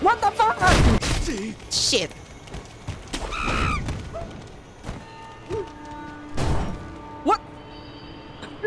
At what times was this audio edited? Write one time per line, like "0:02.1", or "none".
0:01.0